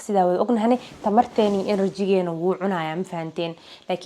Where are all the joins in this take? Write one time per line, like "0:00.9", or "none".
none